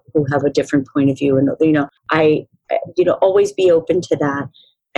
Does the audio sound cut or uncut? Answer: cut